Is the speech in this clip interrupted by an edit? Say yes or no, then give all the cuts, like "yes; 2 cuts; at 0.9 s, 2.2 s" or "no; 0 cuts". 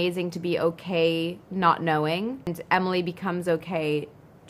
yes; 1 cut; at 2.5 s